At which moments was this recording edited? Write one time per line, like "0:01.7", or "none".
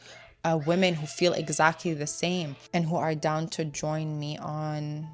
0:02.6